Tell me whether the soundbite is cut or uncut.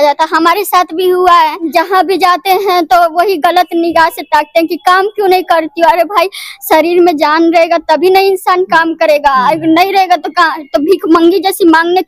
cut